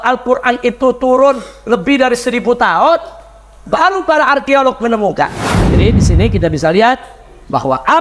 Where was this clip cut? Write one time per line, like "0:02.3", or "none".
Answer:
0:05.8